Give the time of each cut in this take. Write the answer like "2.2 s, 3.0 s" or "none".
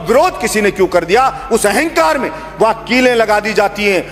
none